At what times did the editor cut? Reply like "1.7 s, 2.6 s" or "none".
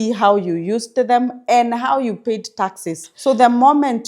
3.1 s